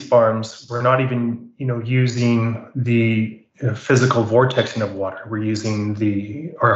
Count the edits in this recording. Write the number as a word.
zero